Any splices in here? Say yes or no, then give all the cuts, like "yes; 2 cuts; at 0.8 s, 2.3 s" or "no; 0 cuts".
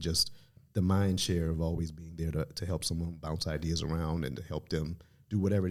no; 0 cuts